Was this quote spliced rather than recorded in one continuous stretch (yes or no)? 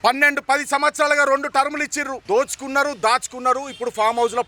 yes